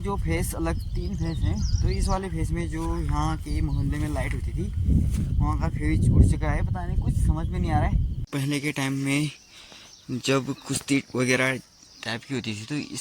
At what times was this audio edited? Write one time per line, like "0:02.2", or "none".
0:08.2